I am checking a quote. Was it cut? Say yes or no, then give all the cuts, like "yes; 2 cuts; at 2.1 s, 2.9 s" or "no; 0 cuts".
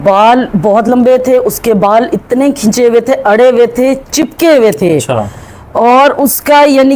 no; 0 cuts